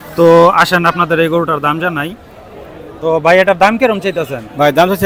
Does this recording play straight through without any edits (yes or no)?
yes